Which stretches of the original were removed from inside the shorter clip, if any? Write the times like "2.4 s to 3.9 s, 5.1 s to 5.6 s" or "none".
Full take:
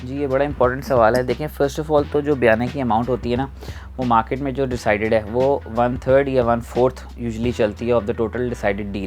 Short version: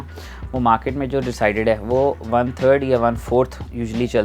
none